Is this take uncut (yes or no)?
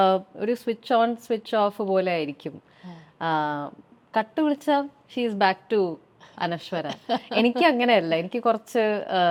yes